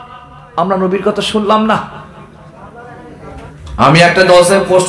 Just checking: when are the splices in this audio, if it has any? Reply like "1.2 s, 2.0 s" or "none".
3.5 s